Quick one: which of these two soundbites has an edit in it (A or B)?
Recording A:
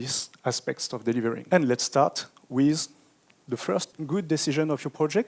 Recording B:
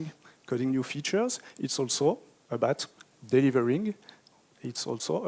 A